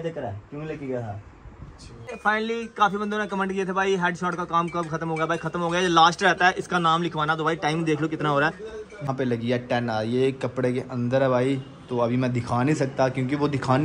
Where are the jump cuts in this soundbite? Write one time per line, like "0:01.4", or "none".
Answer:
0:02.2
0:09.1